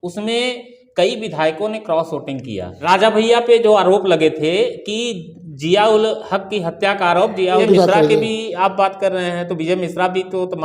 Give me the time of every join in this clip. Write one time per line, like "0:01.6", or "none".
0:03.0
0:07.6